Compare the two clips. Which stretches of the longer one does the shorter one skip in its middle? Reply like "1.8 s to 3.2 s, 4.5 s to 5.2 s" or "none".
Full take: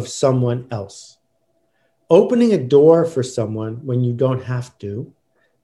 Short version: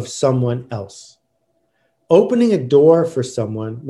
none

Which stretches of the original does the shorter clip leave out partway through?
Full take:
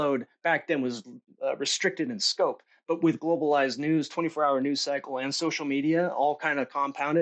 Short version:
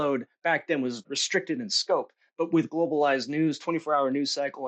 1.2 s to 1.7 s

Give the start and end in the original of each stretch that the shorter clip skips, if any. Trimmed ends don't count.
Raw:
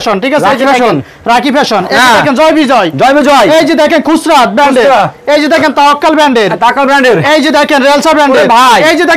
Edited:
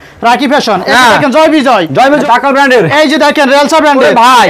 3.3 s to 6.6 s

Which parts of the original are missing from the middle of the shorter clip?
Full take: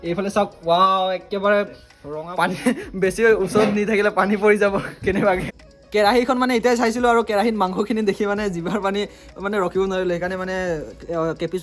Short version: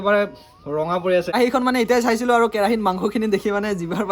2.7 s to 6.1 s

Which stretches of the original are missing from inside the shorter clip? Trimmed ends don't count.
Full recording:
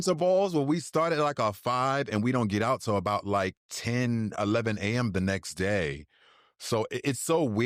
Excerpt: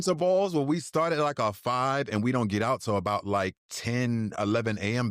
none

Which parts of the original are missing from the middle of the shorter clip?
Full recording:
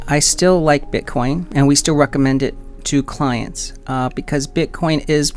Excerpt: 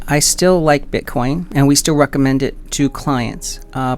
2.6 s to 2.8 s

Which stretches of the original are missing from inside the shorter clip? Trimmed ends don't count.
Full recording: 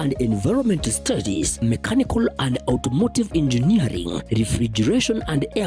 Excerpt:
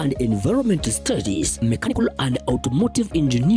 1.9 s to 2.1 s

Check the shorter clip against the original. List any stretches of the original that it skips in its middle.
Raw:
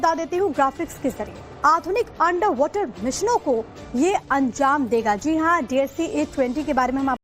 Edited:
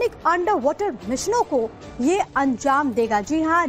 none

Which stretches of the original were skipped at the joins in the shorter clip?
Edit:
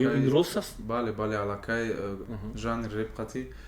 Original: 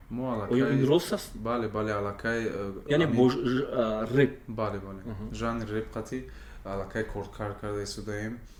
2.7 s to 5.0 s

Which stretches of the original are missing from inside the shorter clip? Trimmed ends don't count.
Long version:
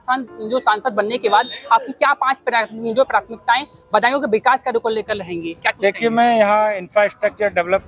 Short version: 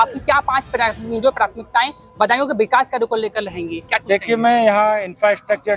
none

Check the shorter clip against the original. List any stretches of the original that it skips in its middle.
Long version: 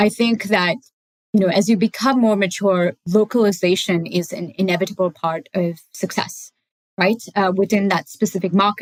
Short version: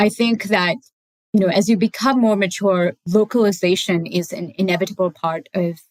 none

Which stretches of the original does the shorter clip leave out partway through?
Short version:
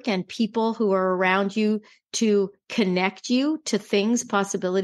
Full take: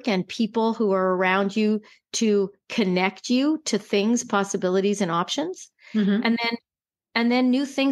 none

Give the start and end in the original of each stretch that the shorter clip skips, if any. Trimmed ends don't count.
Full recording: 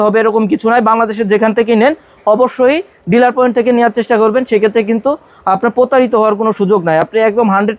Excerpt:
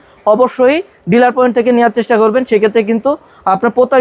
none

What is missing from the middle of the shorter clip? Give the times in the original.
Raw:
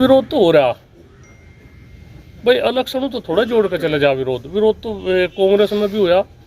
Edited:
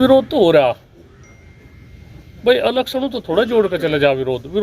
none

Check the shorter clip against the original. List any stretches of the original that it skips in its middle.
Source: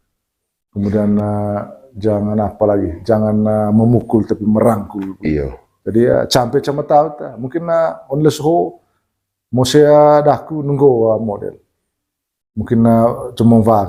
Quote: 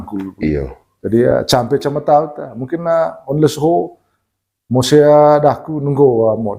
none

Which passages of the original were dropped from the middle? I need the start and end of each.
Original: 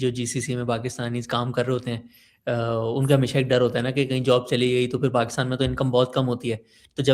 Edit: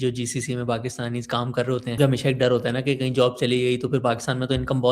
2.0 s to 3.1 s

